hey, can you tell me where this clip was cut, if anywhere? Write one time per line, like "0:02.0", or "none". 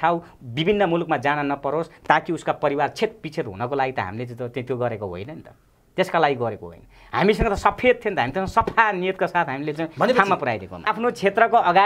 0:10.8